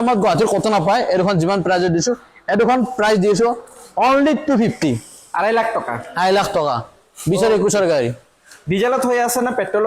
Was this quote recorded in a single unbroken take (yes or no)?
yes